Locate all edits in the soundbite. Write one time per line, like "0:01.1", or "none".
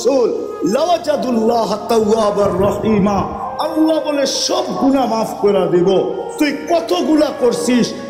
none

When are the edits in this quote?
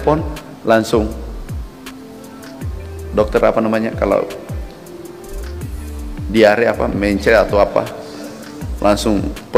none

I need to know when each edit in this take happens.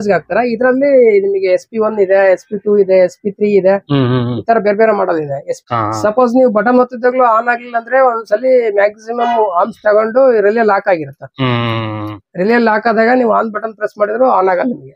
0:05.5

